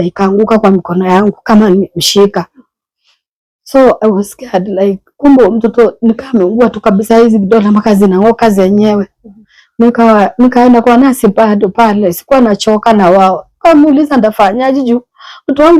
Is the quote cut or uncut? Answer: uncut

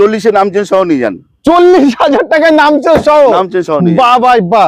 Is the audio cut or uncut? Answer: uncut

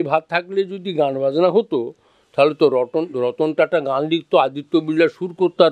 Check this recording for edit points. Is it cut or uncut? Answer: uncut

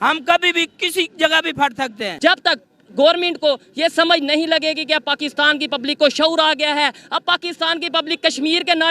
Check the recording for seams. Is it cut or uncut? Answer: cut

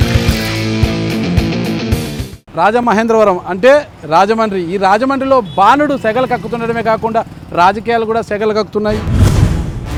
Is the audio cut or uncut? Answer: uncut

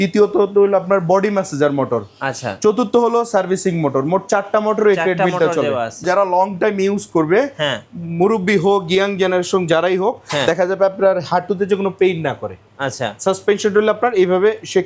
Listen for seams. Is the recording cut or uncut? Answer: cut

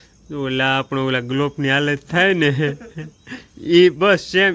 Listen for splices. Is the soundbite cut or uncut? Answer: uncut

